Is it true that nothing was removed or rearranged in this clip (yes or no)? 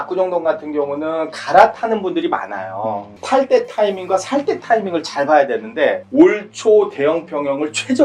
no